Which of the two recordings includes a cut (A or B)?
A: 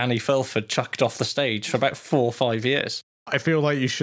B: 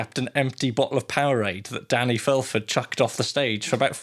A